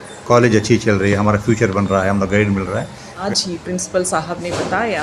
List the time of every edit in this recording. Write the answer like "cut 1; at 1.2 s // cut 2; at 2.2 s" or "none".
cut 1; at 3.1 s